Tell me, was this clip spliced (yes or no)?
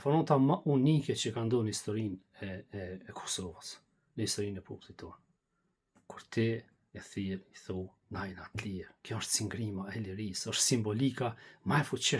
no